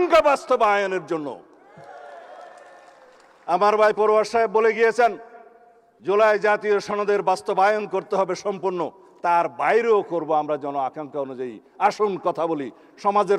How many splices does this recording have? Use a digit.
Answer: 0